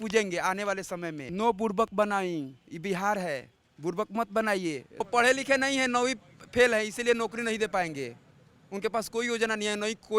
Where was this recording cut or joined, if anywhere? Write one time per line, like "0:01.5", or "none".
0:01.2
0:04.8